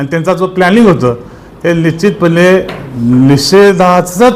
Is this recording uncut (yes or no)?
yes